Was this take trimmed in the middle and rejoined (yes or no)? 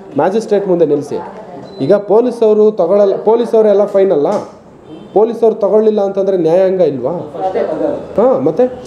no